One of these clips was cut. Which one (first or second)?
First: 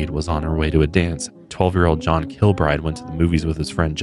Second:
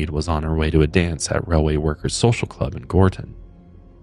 first